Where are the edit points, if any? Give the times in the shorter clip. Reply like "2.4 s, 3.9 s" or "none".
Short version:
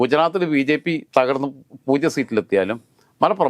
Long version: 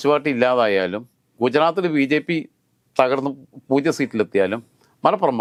1.0 s